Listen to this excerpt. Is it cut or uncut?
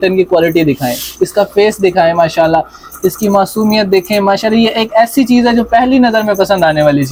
uncut